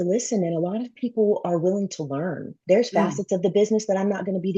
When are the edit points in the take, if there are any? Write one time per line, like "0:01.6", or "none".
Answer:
0:02.5